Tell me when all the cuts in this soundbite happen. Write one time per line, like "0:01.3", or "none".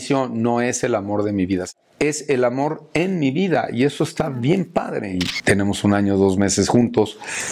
0:01.7
0:05.2